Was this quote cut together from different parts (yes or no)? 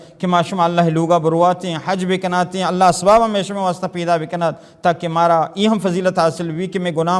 no